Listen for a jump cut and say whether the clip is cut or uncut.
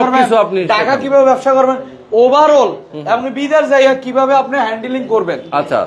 uncut